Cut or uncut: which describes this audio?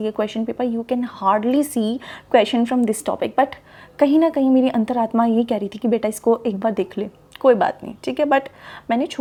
uncut